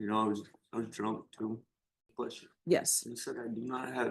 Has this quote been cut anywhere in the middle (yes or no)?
yes